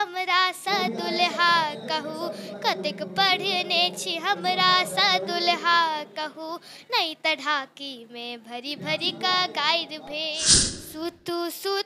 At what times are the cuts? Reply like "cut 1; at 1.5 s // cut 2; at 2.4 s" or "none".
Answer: cut 1; at 10.4 s